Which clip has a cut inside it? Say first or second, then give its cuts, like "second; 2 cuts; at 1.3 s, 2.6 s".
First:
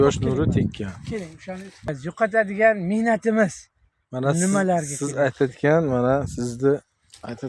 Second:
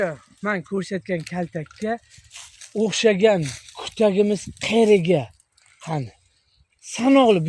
first; 1 cut; at 2.0 s